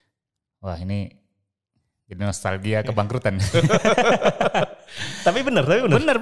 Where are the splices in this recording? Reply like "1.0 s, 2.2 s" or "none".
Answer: none